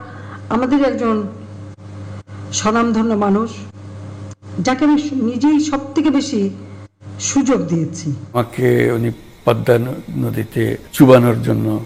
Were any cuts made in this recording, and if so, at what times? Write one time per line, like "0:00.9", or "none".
0:08.4